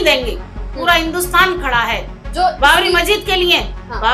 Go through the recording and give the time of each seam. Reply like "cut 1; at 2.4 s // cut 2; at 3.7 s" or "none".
cut 1; at 2.1 s

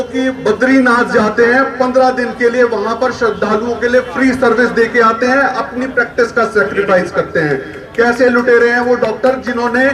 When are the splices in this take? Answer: none

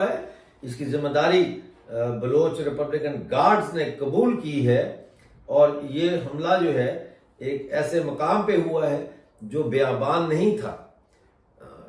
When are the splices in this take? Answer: none

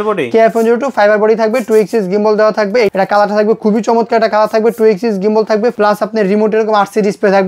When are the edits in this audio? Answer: cut 1; at 2.9 s // cut 2; at 5.8 s

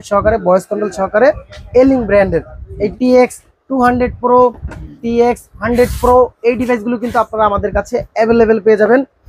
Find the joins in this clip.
cut 1; at 2.9 s

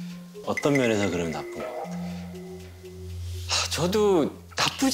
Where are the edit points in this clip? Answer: none

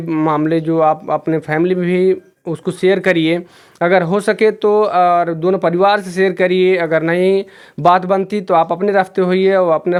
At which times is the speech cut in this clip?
none

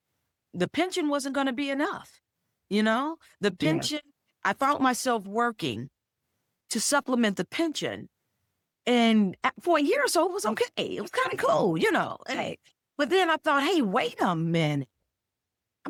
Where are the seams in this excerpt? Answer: none

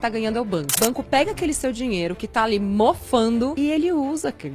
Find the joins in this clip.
cut 1; at 0.8 s // cut 2; at 3.5 s

